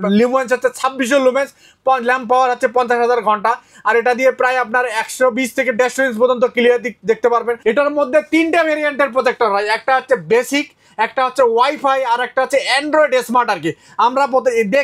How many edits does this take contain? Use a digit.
1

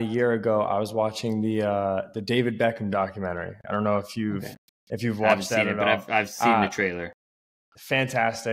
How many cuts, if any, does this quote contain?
0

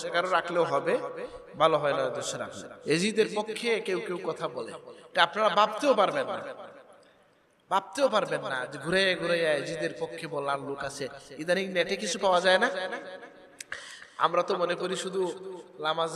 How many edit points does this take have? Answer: 1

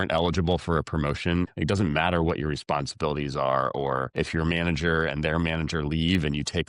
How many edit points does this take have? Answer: 2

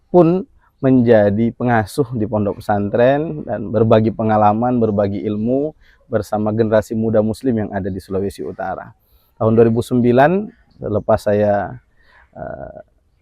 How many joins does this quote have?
0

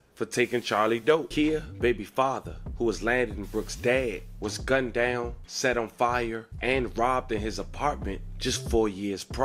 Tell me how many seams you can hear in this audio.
1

